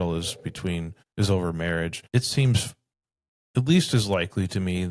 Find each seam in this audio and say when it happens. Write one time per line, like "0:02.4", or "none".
0:01.0
0:02.0